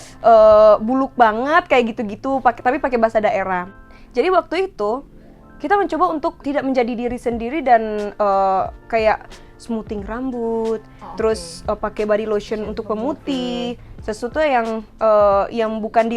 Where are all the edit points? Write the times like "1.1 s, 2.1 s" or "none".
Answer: 3.7 s, 6.4 s